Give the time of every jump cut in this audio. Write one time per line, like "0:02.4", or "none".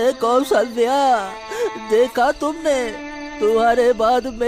none